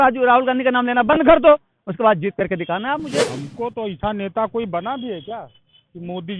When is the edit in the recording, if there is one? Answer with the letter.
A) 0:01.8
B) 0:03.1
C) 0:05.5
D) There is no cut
B